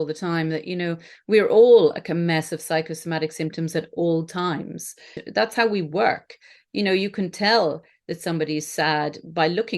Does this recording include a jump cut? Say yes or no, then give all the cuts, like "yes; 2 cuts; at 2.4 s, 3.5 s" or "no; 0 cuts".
yes; 1 cut; at 5.2 s